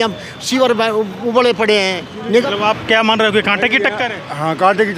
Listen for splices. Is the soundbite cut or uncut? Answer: cut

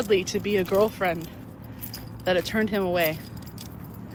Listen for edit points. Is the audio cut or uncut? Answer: uncut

